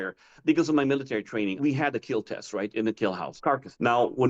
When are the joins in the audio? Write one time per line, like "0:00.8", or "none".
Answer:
0:01.6
0:03.3